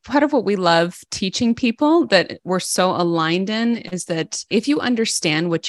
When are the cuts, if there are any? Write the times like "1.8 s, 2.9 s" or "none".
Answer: 4.5 s